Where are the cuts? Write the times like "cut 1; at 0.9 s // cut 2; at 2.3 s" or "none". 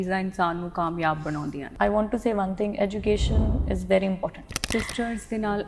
cut 1; at 1.7 s // cut 2; at 4.5 s